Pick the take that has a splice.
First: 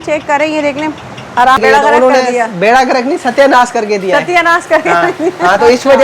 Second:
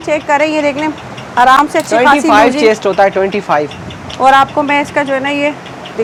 first; 1 cut; at 1.6 s

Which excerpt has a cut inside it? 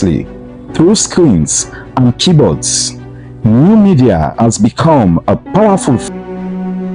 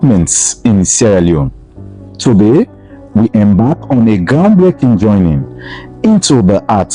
first; 1 cut; at 6.0 s

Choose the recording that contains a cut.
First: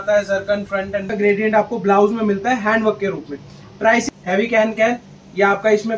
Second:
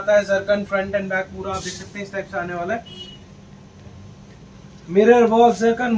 first; 2 cuts; at 1.1 s, 4.1 s

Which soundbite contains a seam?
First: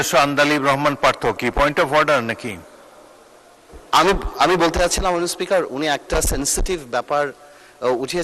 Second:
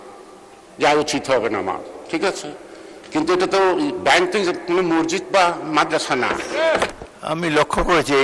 second; 1 cut; at 6.9 s

